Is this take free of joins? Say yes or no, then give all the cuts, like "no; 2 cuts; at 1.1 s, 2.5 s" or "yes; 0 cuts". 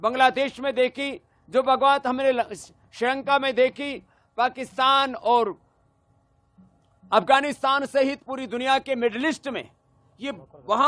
yes; 0 cuts